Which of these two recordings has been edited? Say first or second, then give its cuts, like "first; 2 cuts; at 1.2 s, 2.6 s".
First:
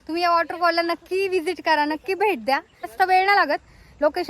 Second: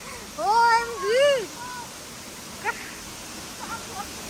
first; 1 cut; at 2.9 s